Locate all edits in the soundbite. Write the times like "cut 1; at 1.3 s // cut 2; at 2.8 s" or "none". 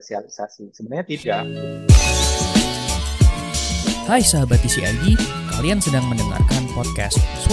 cut 1; at 1.4 s